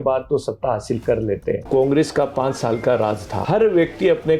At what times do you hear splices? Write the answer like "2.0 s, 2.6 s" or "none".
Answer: 1.6 s, 3.4 s